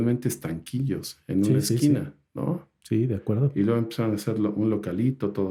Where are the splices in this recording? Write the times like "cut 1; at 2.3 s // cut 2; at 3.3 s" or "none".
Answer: none